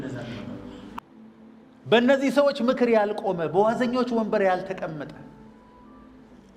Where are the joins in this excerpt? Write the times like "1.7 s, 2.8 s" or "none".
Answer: 0.9 s